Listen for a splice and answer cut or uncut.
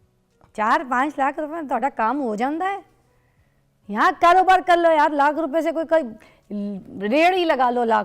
uncut